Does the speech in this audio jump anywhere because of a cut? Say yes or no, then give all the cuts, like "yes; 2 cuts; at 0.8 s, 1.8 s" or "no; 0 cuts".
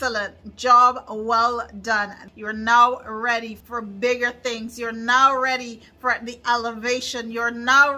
yes; 2 cuts; at 2.2 s, 3.5 s